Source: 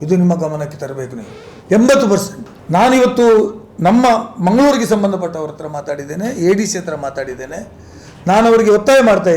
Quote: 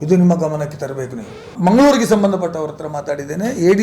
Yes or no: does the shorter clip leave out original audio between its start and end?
yes